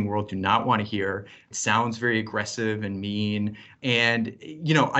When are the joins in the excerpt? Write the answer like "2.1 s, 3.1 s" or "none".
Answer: 1.4 s